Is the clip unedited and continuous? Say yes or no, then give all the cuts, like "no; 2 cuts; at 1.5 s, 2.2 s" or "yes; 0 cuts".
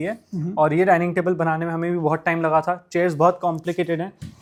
yes; 0 cuts